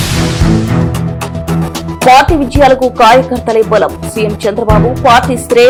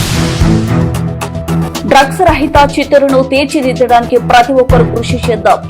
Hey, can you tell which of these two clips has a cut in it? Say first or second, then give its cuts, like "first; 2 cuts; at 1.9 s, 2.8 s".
second; 1 cut; at 1.8 s